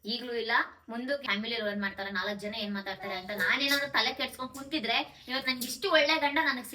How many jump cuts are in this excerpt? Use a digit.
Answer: 1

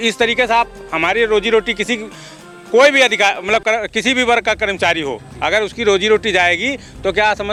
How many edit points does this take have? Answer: 0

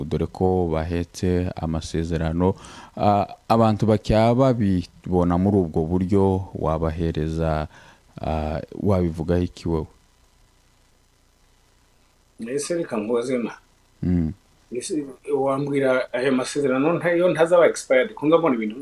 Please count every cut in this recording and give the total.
0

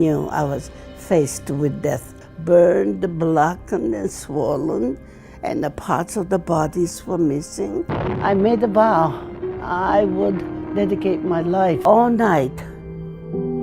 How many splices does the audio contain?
3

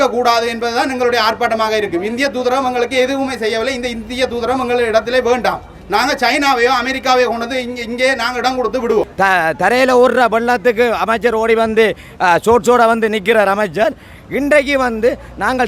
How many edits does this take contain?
1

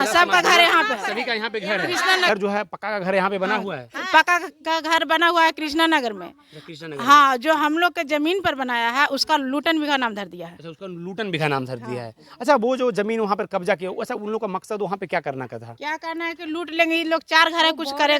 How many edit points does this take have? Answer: 1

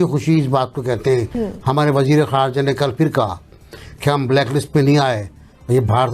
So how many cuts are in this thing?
1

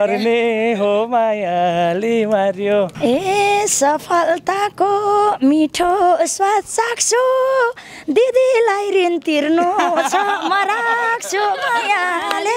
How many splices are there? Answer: 1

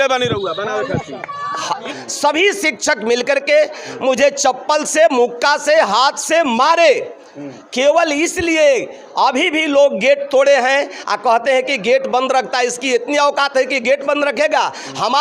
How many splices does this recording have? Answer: 1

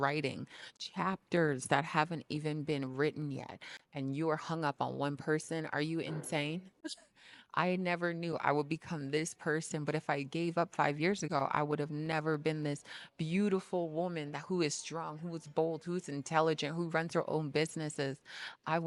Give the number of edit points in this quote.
0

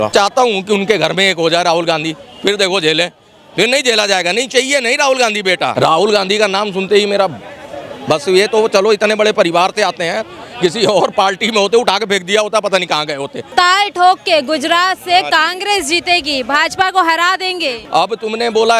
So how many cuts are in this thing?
3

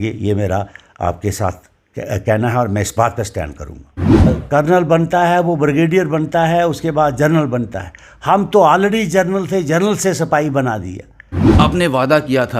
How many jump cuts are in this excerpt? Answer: 2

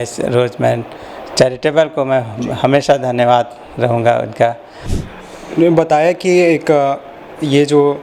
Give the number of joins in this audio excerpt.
1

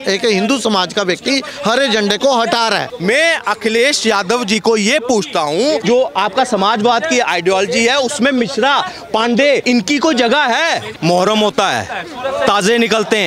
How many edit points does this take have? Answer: 4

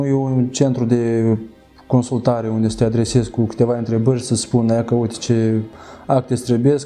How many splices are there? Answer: 0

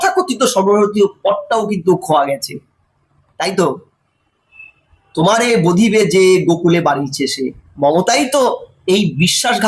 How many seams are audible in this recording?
0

